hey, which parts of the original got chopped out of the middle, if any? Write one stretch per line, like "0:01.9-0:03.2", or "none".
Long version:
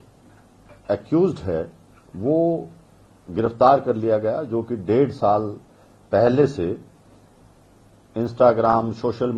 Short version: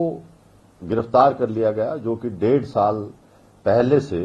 none